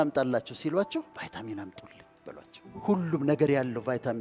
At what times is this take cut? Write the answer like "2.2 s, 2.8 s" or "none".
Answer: 1.1 s, 2.8 s